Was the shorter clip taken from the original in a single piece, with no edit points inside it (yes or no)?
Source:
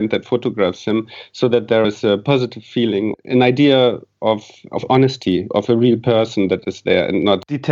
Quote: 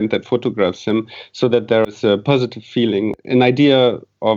yes